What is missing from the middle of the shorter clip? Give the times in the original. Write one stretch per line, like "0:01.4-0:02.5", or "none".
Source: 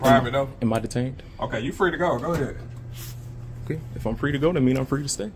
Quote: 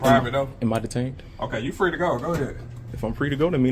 0:02.8-0:03.8